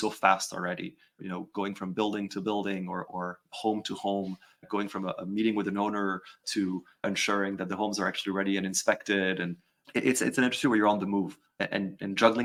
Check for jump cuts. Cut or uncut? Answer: uncut